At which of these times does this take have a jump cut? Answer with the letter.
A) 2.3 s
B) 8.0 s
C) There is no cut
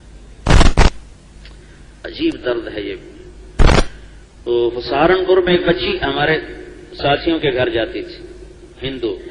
C